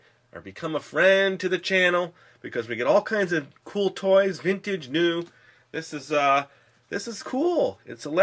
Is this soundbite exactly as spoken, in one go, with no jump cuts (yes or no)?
yes